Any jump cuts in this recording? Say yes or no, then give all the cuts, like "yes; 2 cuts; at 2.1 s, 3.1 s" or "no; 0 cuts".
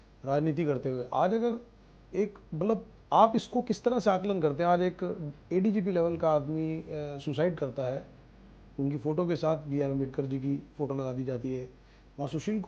no; 0 cuts